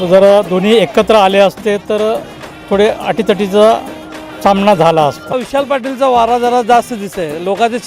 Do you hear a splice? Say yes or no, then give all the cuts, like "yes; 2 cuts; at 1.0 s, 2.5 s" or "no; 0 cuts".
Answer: yes; 1 cut; at 5.3 s